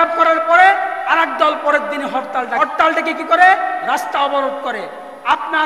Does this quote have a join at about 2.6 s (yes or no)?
yes